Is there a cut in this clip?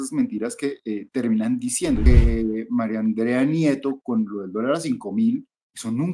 yes; 1 cut; at 2.1 s

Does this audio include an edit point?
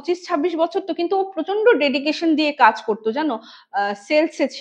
no; 0 cuts

